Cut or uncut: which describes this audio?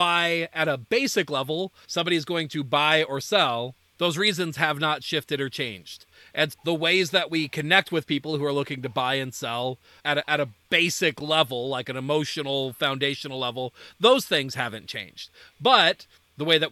cut